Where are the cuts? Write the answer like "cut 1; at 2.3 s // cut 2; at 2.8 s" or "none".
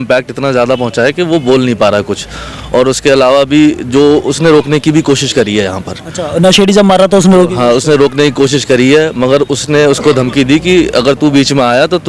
none